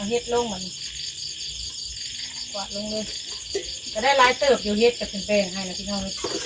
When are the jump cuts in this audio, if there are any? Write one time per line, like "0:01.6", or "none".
none